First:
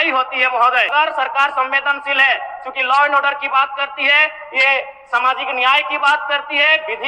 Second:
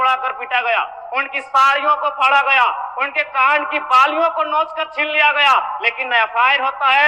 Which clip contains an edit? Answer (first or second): first